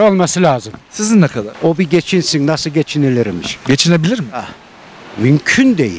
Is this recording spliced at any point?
yes; 1 cut; at 1.4 s

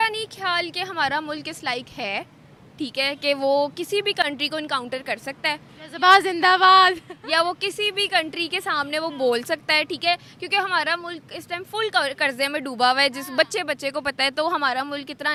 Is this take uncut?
yes; 0 cuts

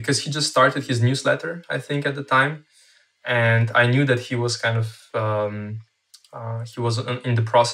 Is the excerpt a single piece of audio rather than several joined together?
yes; 0 cuts

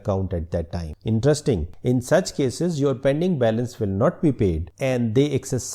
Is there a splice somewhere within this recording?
yes; 1 cut; at 0.9 s

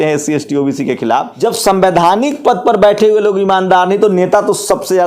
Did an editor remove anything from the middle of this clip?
yes; 1 cut; at 1.3 s

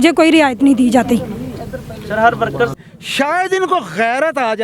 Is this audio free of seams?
no; 1 cut; at 2.7 s

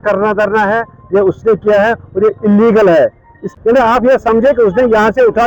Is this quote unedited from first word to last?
no; 1 cut; at 3.5 s

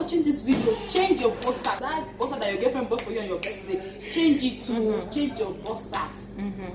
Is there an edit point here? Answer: yes; 1 cut; at 1.8 s

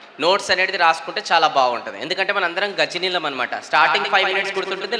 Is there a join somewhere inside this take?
no; 0 cuts

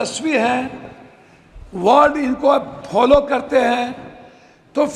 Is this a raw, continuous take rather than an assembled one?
yes; 0 cuts

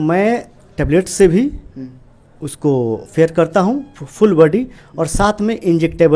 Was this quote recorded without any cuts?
yes; 0 cuts

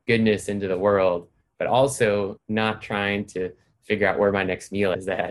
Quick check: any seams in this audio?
no; 0 cuts

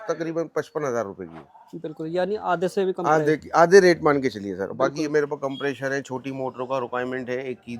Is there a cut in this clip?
no; 0 cuts

